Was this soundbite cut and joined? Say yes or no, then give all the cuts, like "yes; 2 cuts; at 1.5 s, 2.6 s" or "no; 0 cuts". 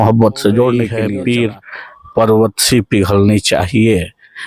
yes; 1 cut; at 0.9 s